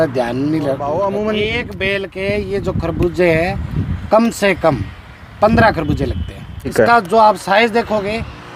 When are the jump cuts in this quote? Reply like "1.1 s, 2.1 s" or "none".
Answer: 0.9 s, 6.7 s

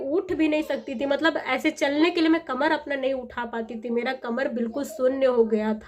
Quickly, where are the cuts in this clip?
none

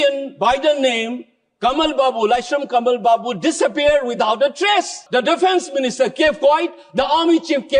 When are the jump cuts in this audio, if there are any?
5.0 s

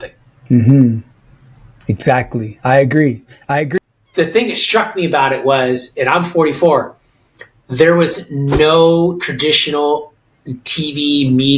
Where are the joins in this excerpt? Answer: 3.7 s

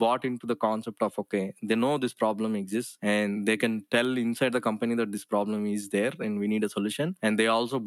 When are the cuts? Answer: none

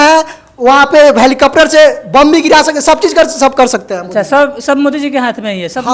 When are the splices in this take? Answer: none

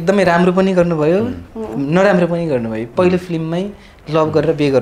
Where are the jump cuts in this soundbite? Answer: none

